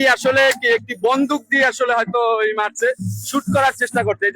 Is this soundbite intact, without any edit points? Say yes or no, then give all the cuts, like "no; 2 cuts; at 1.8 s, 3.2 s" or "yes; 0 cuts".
yes; 0 cuts